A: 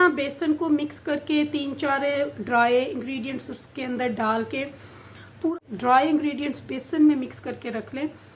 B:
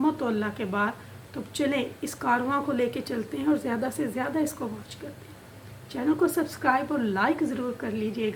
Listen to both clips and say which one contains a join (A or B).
A